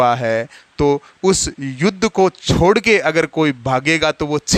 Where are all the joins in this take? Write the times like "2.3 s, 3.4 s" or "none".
none